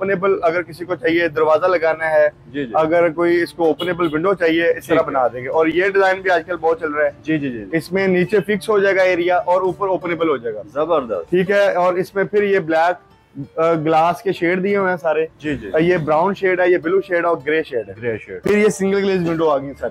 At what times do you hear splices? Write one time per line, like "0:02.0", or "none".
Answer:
none